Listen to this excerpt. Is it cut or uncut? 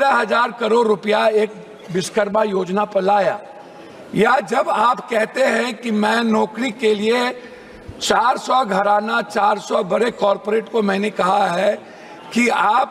uncut